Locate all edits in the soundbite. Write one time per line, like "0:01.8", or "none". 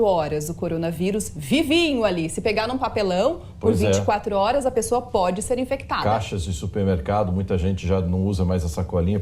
0:01.3
0:07.3